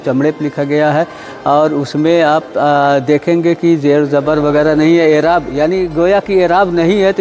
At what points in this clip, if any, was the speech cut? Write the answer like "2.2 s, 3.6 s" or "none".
none